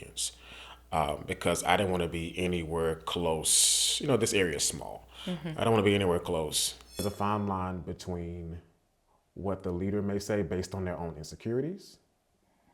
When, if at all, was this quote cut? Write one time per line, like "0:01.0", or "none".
0:07.0